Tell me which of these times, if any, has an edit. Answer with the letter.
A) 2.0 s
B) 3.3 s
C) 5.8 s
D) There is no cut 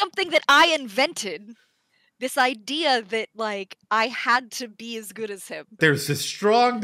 C